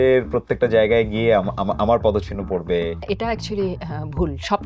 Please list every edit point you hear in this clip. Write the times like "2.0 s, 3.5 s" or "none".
3.0 s